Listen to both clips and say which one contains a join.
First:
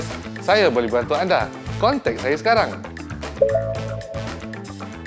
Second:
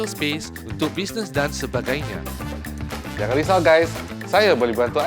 first; 1 cut; at 4.1 s

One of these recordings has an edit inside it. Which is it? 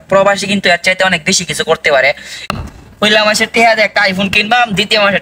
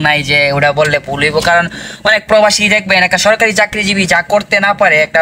first; 1 cut; at 2.5 s

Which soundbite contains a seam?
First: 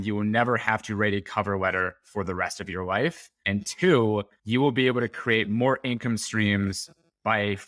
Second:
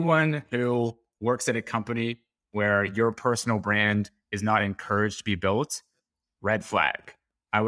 first; 2 cuts; at 3.3 s, 4.4 s

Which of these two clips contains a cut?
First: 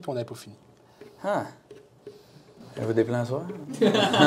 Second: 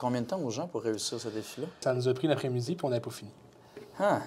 second; 1 cut; at 1.8 s

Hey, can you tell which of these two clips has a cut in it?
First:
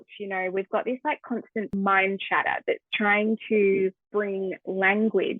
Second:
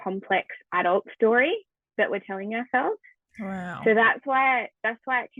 first; 2 cuts; at 1.7 s, 4.0 s

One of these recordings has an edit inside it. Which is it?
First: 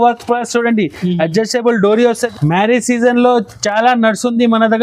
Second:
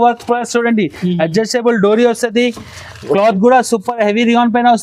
first; 1 cut; at 2.2 s

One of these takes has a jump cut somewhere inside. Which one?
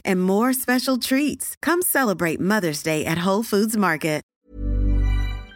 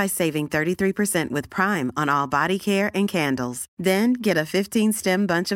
first; 1 cut; at 4.3 s

